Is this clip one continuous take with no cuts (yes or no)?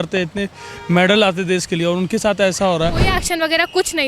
no